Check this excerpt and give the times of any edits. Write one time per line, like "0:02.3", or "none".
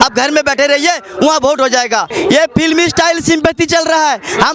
0:02.1